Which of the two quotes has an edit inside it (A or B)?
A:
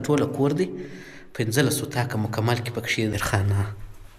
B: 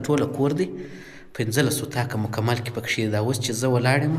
A